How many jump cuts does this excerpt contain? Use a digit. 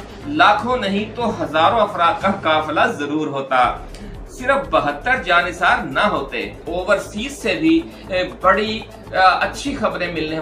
1